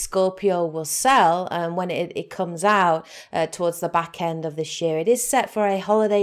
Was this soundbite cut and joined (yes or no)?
yes